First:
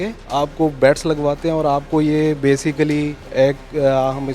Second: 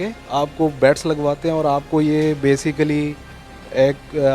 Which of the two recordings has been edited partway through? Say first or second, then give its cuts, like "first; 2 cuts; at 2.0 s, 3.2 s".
first; 1 cut; at 3.2 s